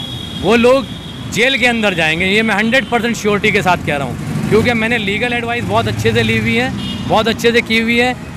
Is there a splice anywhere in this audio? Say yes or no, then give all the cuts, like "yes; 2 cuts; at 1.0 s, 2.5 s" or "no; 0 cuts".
no; 0 cuts